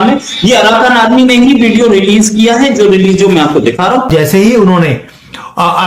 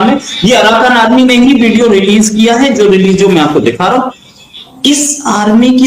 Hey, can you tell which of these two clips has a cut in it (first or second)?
first